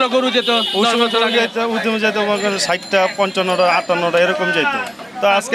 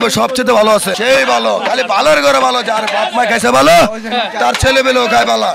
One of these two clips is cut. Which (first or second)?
second